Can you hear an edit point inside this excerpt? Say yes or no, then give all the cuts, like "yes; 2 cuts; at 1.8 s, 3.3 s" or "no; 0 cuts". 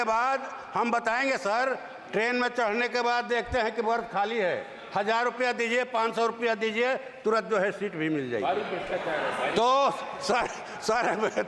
no; 0 cuts